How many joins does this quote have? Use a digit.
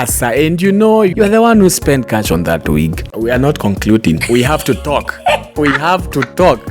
2